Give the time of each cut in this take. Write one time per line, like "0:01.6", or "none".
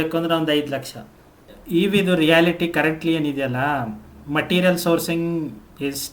0:01.5